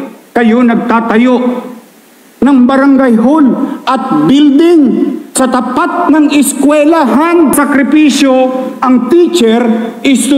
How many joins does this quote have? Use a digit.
1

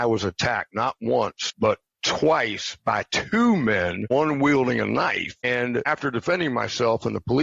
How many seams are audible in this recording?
3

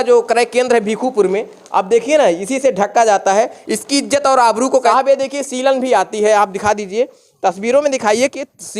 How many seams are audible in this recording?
1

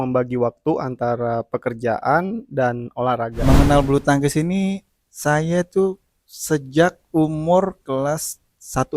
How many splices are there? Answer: 1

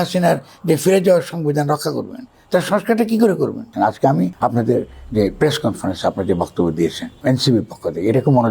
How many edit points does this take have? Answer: 2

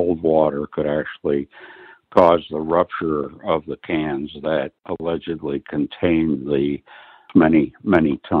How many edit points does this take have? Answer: 2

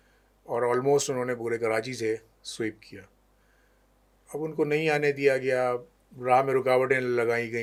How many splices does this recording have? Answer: 0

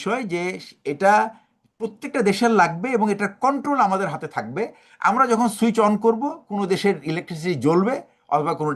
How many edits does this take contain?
0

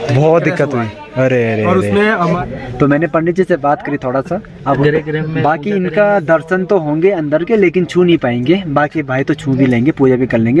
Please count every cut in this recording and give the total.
2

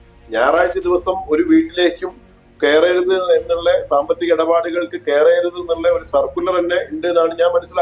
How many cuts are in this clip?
0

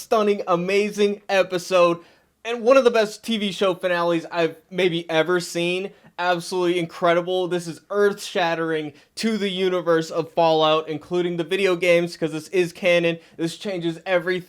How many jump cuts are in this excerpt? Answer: 0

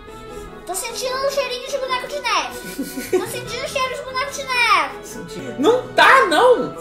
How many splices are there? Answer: 1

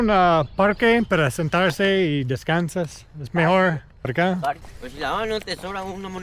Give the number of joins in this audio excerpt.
2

